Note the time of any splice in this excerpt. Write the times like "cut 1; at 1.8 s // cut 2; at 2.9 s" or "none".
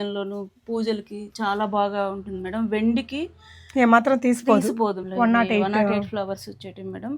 cut 1; at 5.0 s

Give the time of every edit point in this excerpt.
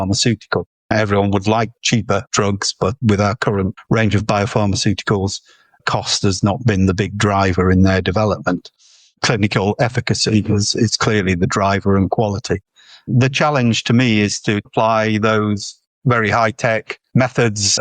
cut 1; at 0.9 s // cut 2; at 2.3 s // cut 3; at 3.8 s

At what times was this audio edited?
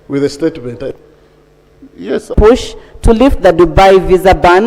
cut 1; at 2.3 s

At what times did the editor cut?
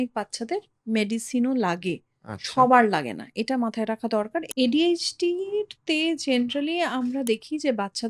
cut 1; at 4.5 s

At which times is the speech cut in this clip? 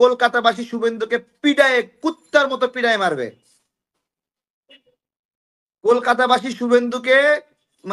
none

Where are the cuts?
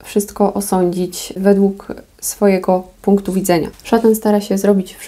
cut 1; at 1.4 s // cut 2; at 3.7 s

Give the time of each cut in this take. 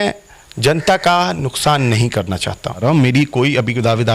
cut 1; at 2.8 s

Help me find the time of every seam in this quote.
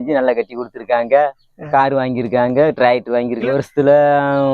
cut 1; at 3.5 s

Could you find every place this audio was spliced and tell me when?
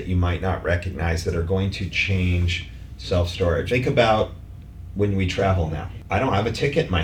cut 1; at 3.7 s // cut 2; at 5.9 s

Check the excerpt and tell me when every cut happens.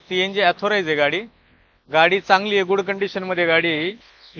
none

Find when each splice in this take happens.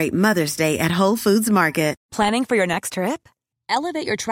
cut 1; at 2.0 s

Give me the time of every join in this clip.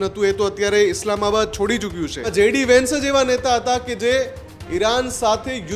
cut 1; at 2.2 s

